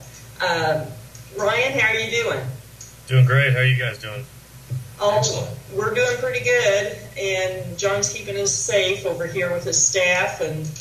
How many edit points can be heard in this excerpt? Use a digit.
0